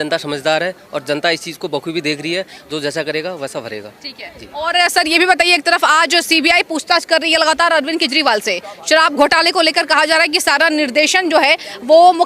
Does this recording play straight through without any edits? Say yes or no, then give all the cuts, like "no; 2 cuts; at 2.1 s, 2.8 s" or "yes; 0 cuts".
yes; 0 cuts